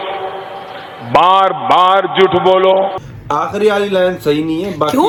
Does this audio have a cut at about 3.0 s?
no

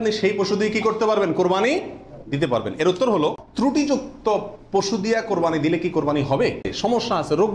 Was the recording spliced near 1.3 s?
no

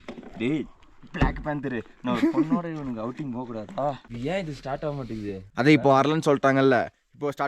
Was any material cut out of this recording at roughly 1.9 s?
no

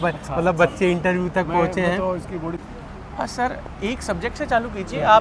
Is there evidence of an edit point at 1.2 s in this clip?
no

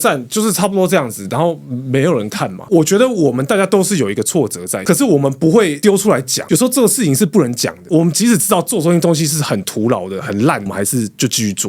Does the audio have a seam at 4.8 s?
yes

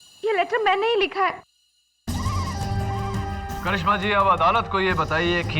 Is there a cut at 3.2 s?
no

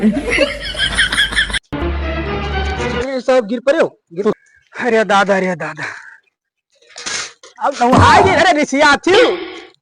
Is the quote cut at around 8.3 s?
no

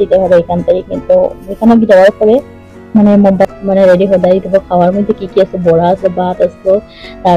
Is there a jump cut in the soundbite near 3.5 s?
yes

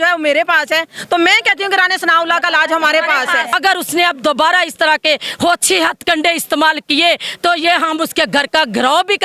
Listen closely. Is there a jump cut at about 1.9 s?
no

